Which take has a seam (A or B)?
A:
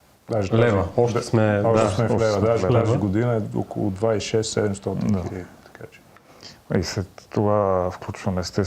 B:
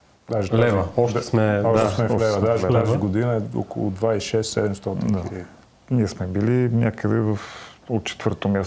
B